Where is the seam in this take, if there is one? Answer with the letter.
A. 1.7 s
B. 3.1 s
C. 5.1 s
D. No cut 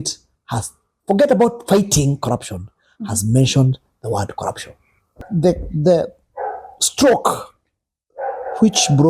C